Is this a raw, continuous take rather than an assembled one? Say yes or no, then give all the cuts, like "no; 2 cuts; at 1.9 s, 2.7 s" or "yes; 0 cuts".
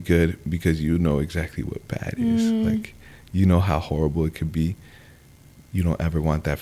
yes; 0 cuts